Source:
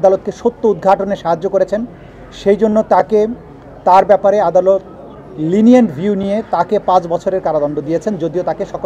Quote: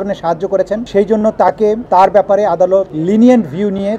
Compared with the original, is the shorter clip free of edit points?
no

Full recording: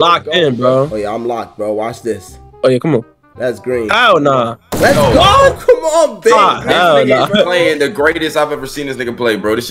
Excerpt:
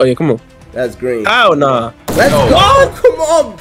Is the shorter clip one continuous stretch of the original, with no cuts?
yes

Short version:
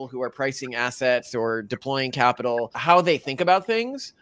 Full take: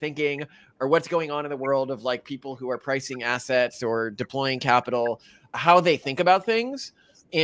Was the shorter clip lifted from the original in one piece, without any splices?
no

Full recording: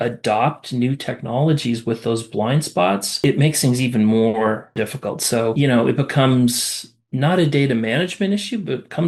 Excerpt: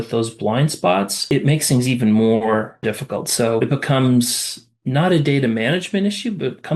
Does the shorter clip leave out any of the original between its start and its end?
yes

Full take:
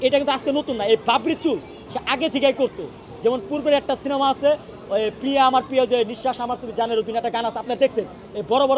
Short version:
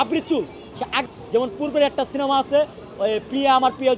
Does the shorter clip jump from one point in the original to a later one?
yes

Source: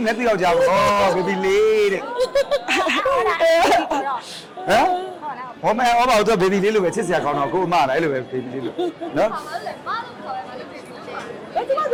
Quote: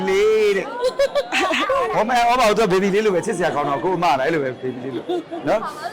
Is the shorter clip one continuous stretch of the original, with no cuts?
no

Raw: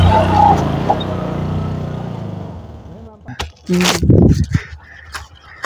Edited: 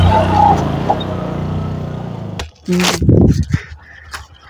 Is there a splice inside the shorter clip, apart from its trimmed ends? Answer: yes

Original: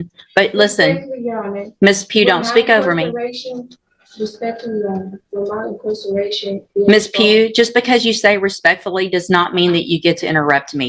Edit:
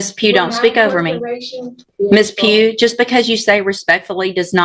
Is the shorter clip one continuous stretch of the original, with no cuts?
no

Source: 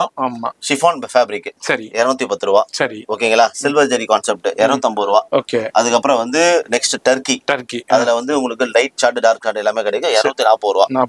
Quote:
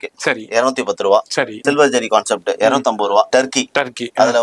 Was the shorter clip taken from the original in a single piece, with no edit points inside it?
no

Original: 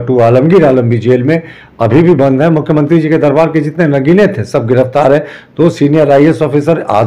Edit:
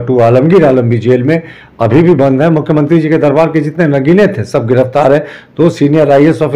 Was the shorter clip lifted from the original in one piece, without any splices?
yes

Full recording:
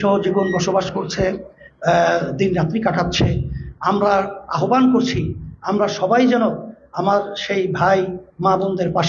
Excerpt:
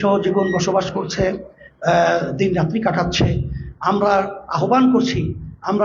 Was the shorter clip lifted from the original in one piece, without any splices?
yes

